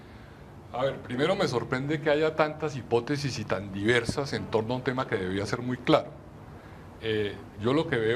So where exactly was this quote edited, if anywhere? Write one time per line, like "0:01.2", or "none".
0:02.1